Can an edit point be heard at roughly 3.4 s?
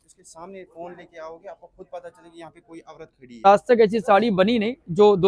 yes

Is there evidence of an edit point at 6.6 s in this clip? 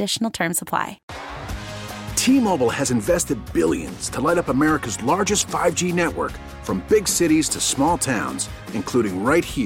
no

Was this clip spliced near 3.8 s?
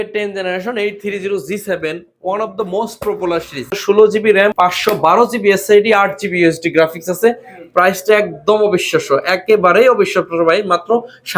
yes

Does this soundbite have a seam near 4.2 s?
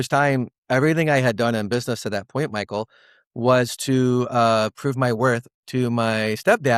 no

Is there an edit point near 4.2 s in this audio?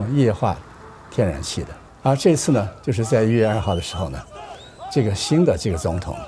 no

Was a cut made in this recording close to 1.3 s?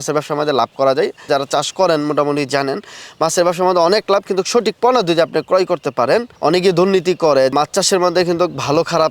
yes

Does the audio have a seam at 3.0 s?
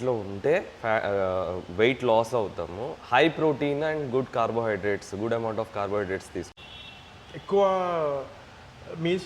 no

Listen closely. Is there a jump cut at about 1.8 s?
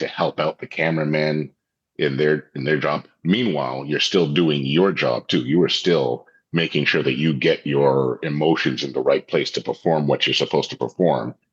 no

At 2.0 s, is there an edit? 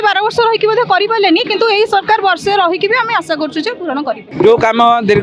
no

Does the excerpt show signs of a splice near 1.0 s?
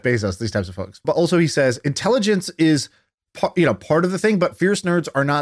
yes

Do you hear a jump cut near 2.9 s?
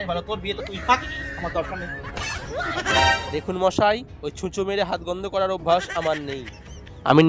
yes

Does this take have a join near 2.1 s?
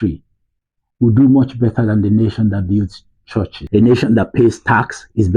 no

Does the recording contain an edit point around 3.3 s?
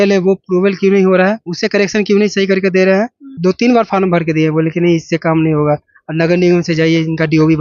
yes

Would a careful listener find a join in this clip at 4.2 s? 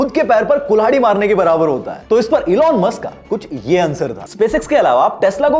yes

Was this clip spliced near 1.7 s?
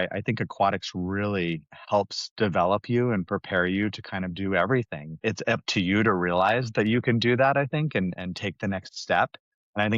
yes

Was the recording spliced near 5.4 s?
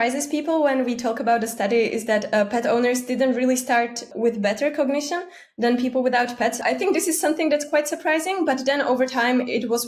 no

